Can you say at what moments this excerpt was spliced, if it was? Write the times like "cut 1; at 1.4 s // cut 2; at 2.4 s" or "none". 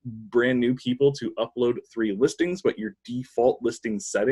none